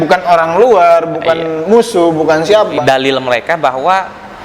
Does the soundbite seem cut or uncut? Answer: cut